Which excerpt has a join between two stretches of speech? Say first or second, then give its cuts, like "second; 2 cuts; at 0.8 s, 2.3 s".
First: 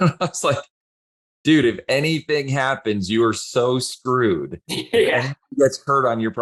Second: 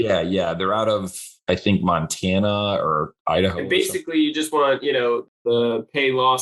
second; 1 cut; at 5.4 s